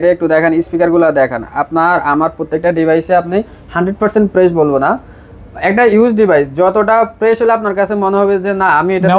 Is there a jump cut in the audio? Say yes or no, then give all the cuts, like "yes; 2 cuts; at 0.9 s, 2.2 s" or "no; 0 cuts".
no; 0 cuts